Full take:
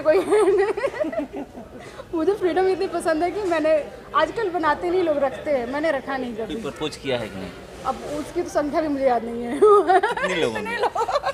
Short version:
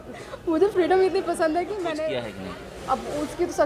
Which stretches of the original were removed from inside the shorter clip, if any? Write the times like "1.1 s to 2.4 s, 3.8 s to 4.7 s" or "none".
3.7 s to 7.0 s